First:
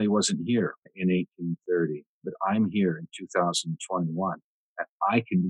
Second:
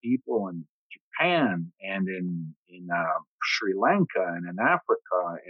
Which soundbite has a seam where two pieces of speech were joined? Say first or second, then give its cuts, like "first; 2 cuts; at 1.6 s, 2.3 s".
first; 2 cuts; at 0.9 s, 2.2 s